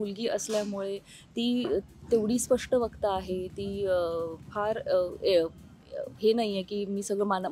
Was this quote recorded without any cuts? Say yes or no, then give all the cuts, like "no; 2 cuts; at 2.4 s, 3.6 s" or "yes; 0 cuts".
yes; 0 cuts